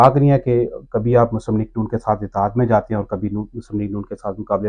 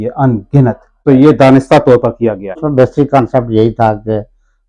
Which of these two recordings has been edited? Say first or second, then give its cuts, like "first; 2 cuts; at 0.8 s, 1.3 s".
second; 2 cuts; at 1.0 s, 2.6 s